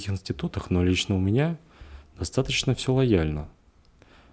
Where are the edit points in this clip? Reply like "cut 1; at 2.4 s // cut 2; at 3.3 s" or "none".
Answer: none